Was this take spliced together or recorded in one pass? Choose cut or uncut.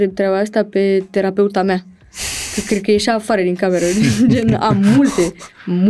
uncut